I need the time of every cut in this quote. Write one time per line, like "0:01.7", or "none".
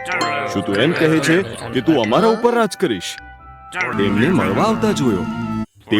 0:03.9